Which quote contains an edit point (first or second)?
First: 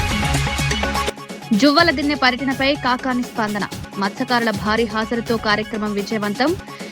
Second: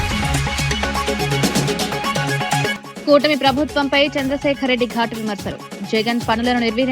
second